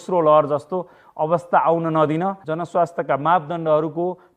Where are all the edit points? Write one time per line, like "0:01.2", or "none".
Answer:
0:02.4